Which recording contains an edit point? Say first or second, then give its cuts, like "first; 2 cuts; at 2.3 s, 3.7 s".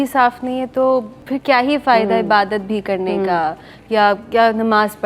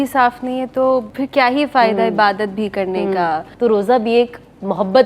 second; 2 cuts; at 1.1 s, 3.5 s